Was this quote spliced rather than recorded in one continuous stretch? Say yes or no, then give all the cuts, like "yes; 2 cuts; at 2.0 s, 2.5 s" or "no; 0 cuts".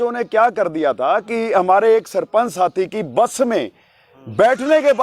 no; 0 cuts